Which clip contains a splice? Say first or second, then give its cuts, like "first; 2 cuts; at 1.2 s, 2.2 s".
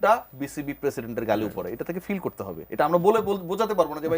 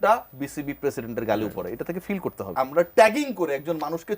second; 1 cut; at 2.5 s